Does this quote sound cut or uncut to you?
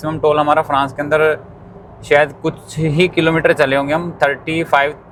uncut